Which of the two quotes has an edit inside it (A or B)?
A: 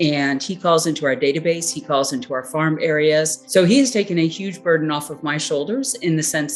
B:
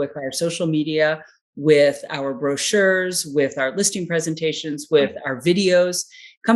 A